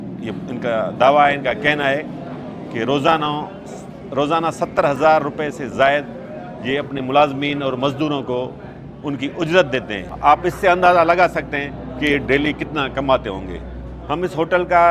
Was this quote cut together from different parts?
no; 0 cuts

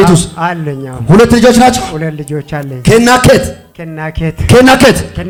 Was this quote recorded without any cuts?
yes; 0 cuts

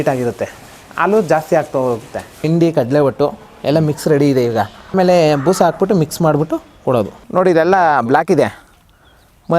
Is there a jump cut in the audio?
yes; 3 cuts; at 2.5 s, 4.8 s, 7.2 s

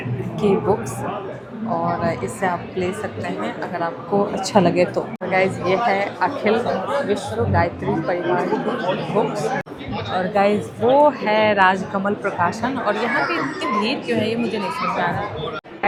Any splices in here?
no; 0 cuts

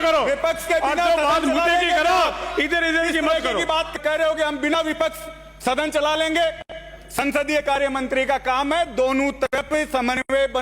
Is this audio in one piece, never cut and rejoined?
no; 1 cut; at 3.9 s

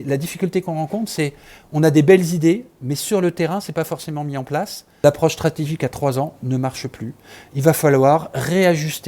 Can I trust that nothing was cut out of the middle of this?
no; 1 cut; at 5.0 s

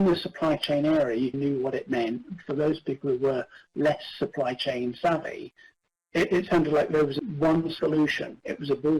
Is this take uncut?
no; 1 cut; at 1.3 s

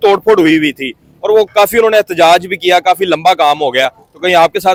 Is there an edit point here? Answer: no; 0 cuts

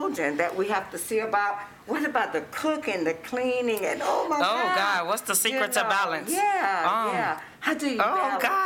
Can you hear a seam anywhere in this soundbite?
no; 0 cuts

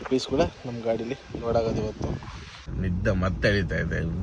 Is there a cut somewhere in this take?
yes; 1 cut; at 2.6 s

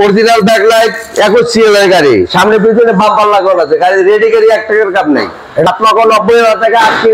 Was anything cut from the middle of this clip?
yes; 1 cut; at 5.7 s

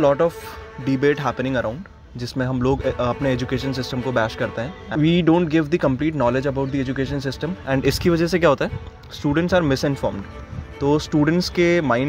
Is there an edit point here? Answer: yes; 1 cut; at 4.8 s

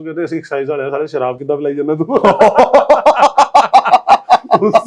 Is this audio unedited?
yes; 0 cuts

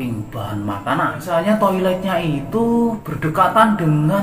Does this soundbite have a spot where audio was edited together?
yes; 2 cuts; at 1.2 s, 3.1 s

